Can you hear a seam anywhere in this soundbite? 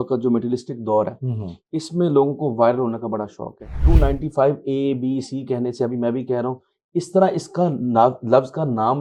yes; 1 cut; at 3.8 s

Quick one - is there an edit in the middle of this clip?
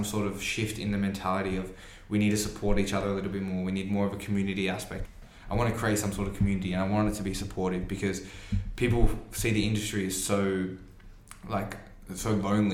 yes; 1 cut; at 5.0 s

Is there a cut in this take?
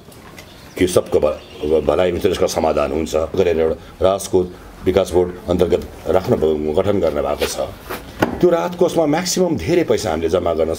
yes; 1 cut; at 3.4 s

